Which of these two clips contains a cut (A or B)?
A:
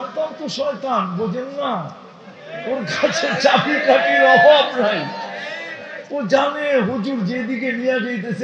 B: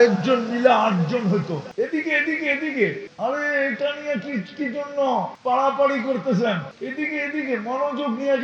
B